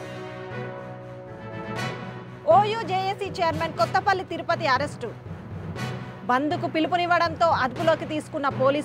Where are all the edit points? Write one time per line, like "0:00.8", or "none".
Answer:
0:01.6